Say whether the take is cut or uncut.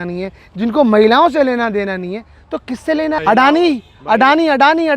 cut